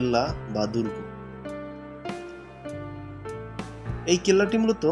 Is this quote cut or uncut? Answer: uncut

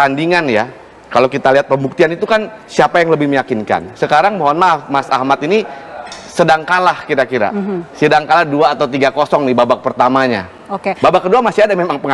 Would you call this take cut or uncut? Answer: uncut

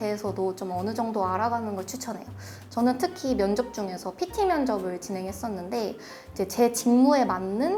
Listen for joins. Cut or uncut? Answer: uncut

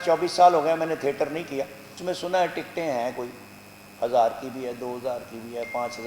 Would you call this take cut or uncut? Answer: cut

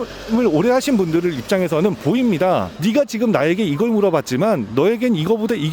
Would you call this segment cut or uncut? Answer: uncut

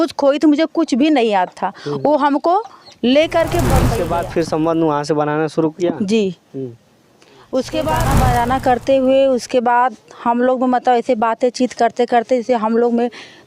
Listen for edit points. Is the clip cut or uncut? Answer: cut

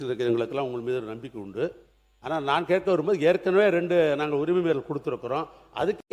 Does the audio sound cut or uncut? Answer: uncut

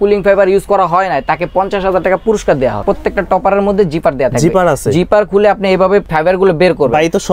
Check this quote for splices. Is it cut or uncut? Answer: cut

